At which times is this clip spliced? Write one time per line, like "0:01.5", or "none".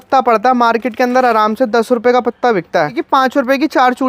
0:03.0